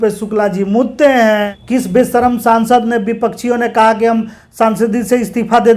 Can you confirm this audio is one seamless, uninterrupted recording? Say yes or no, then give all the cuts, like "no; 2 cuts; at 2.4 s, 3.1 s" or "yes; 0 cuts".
no; 1 cut; at 1.5 s